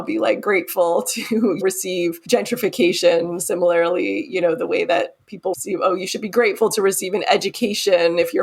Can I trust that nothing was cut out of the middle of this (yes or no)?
no